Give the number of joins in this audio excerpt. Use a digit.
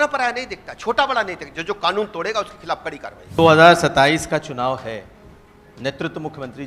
1